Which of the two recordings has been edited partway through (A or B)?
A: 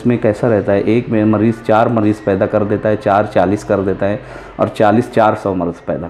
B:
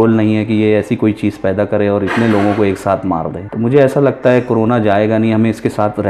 B